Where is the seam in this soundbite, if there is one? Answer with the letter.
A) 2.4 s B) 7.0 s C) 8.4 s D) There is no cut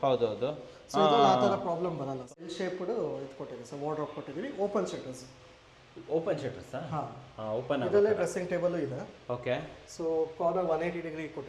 A